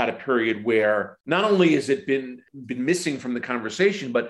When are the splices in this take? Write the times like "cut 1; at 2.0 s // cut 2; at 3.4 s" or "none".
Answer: cut 1; at 1.1 s // cut 2; at 2.4 s